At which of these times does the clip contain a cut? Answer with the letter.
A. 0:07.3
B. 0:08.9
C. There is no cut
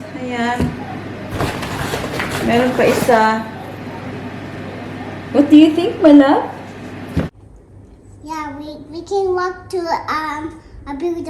A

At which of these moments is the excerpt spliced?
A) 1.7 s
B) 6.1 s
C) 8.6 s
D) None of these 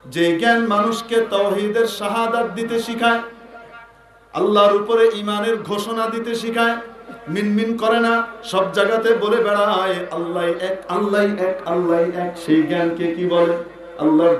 D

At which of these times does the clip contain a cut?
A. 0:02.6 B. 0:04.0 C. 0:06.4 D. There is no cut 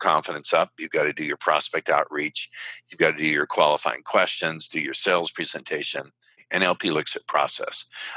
C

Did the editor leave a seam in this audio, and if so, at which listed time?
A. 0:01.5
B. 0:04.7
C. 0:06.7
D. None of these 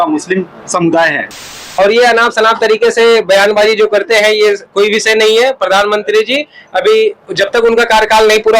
A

